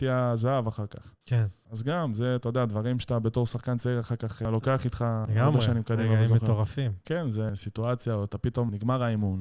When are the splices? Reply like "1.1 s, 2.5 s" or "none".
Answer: 1.5 s, 4.4 s, 5.3 s, 7.5 s, 8.7 s